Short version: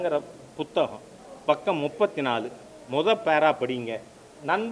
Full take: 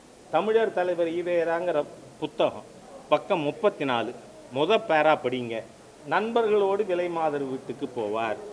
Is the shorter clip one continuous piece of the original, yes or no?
yes